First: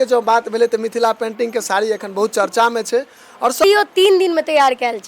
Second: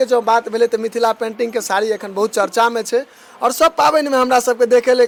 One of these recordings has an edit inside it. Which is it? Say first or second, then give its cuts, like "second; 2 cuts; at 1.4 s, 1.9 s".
first; 1 cut; at 3.6 s